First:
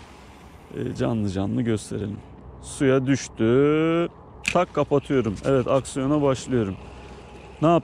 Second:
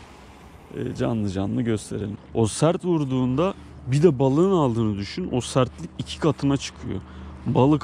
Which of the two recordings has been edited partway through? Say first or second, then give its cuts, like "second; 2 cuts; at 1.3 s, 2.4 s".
second; 1 cut; at 2.2 s